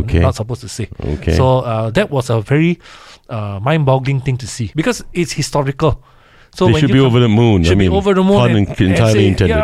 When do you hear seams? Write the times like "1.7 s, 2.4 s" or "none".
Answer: 4.6 s